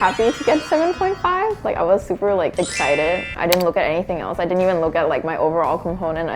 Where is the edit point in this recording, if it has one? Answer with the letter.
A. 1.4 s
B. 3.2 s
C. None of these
B